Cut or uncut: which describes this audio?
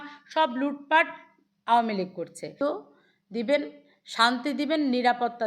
cut